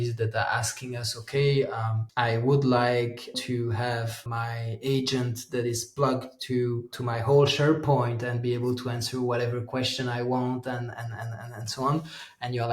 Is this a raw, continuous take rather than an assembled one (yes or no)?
no